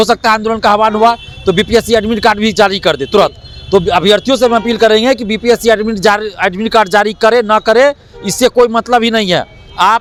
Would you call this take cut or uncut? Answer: uncut